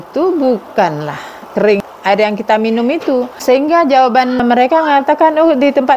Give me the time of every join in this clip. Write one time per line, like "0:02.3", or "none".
0:01.9
0:03.3
0:04.4